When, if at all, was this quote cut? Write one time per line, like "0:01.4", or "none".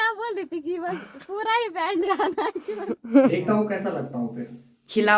0:03.3

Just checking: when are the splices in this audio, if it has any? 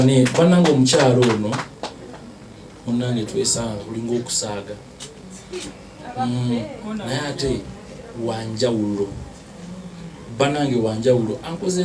none

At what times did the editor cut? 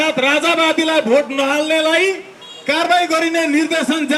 none

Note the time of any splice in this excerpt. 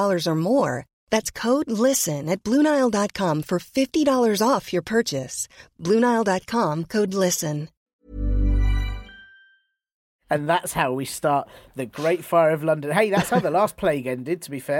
0:07.9
0:10.1

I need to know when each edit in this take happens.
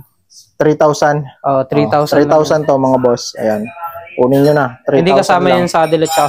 none

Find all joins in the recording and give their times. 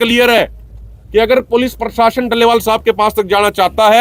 none

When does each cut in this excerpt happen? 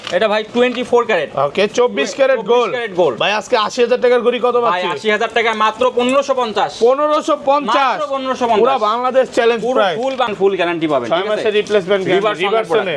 none

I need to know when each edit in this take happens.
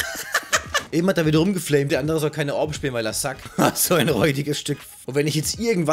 0:00.9
0:01.9
0:04.9

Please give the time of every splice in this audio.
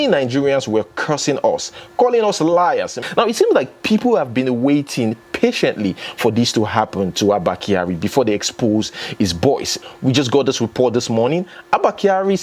0:03.0
0:09.8

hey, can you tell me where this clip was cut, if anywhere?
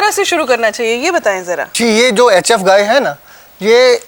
none

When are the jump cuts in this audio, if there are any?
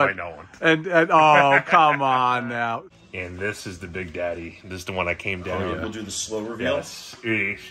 0:02.9

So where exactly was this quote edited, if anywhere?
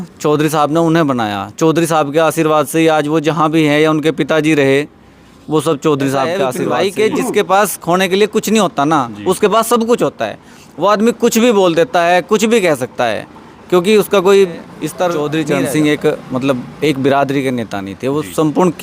0:06.6
0:15.2

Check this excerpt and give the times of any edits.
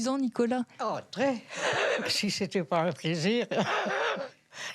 0:02.1

